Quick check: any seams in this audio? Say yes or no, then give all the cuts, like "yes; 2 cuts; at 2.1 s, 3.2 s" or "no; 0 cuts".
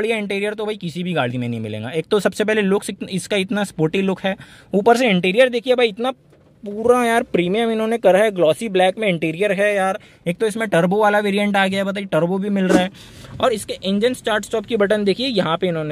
yes; 1 cut; at 13.1 s